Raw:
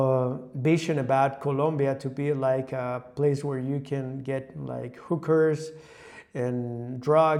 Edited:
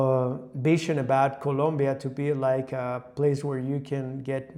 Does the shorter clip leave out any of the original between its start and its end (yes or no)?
no